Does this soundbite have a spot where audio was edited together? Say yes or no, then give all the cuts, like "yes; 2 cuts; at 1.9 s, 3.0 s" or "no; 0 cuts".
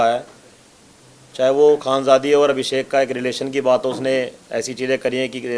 no; 0 cuts